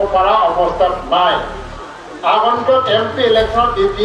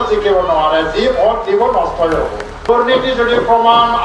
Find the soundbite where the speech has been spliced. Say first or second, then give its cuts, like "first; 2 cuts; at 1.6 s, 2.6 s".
second; 1 cut; at 2.7 s